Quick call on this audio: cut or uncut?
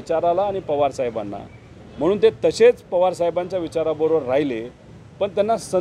uncut